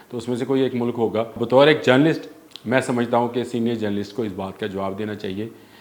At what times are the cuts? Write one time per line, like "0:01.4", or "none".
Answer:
0:01.4